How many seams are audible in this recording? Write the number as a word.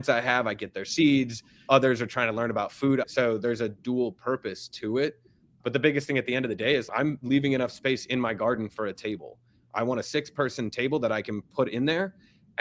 one